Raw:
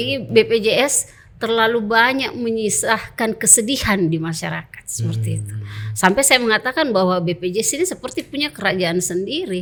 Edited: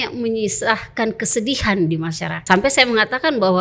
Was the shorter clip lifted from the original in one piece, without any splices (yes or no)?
no